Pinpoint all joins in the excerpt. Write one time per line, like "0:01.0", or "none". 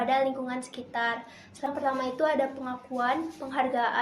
0:01.7